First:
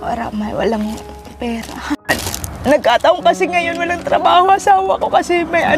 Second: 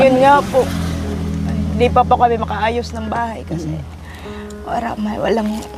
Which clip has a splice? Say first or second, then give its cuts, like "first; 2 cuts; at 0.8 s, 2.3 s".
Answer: first; 1 cut; at 2.1 s